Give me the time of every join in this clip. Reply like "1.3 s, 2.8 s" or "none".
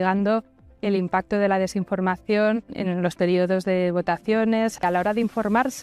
2.7 s, 4.8 s